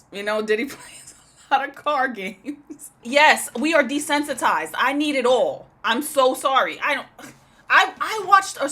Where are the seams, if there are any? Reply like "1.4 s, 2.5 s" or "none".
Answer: 3.0 s